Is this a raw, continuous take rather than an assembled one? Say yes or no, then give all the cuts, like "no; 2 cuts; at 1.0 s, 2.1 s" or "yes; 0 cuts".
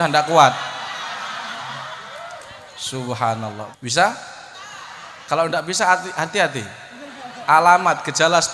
no; 1 cut; at 3.7 s